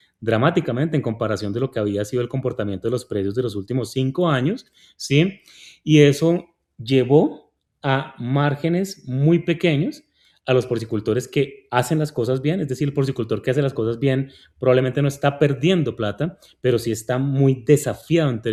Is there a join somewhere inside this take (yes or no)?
no